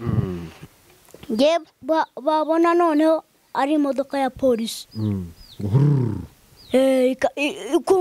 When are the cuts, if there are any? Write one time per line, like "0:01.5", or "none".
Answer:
none